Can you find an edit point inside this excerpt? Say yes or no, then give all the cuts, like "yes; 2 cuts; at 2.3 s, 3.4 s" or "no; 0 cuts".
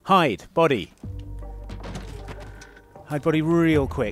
yes; 1 cut; at 0.9 s